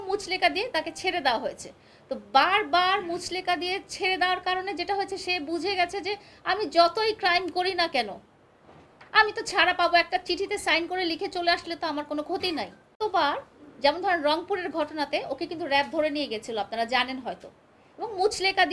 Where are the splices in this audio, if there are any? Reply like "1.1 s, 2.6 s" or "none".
13.0 s